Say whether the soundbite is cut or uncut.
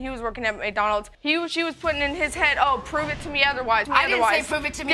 uncut